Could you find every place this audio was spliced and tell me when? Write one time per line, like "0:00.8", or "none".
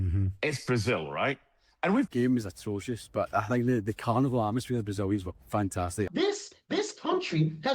0:02.1
0:06.1